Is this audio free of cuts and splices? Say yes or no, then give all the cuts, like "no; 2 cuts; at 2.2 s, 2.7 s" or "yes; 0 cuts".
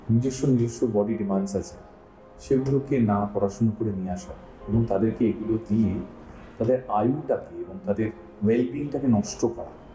yes; 0 cuts